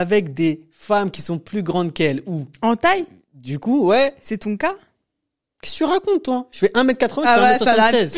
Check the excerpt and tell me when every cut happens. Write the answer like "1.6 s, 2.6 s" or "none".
none